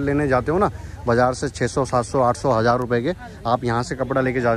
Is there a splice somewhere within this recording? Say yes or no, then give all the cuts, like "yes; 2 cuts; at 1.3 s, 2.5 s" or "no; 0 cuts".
no; 0 cuts